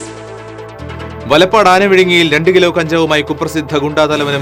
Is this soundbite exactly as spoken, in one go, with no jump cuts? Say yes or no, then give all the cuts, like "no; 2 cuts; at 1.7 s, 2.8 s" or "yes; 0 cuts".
no; 1 cut; at 1.2 s